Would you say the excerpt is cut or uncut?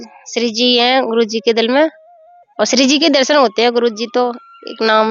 uncut